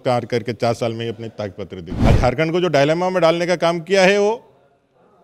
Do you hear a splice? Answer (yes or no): yes